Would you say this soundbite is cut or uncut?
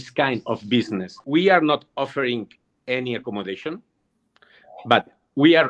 cut